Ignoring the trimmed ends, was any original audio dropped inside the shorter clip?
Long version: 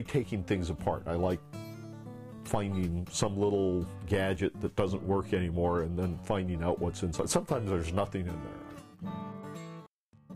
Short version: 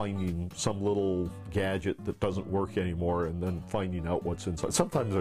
no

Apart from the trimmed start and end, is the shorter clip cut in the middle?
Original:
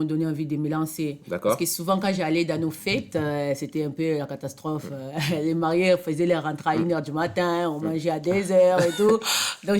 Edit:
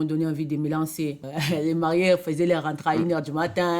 yes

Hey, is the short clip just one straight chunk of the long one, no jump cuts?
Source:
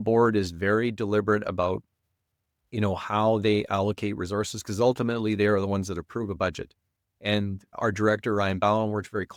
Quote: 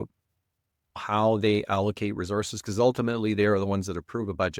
no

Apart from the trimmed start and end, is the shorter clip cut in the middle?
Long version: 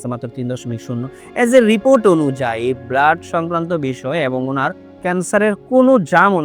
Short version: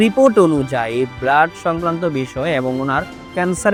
no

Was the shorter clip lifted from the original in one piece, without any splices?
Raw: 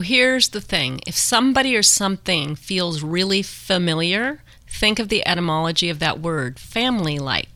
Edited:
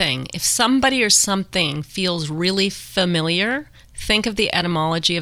yes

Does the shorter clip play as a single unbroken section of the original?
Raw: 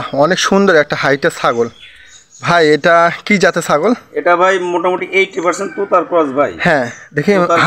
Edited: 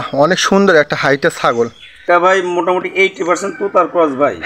no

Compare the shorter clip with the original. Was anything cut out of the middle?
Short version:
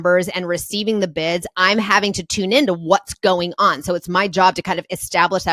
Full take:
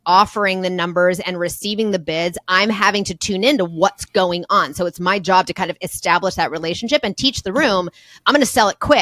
no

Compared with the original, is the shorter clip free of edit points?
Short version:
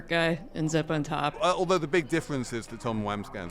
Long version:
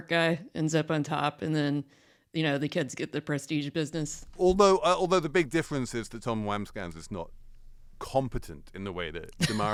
no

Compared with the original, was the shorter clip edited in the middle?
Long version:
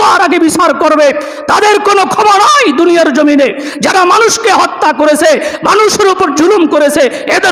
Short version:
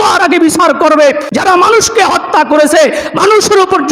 yes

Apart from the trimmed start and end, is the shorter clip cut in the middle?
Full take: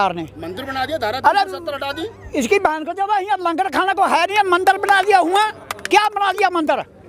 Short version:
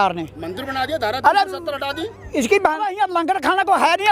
yes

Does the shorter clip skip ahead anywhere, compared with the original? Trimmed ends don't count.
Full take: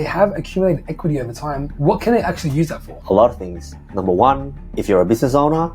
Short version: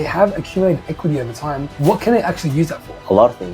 no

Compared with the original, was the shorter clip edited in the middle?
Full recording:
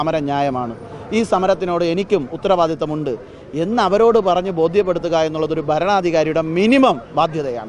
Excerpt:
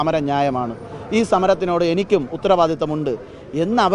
no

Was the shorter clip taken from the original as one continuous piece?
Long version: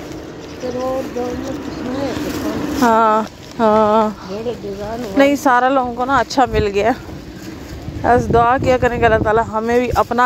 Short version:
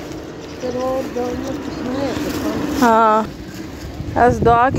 no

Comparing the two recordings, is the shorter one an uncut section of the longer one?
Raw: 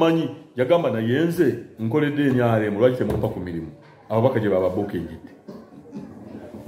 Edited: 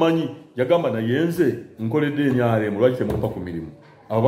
yes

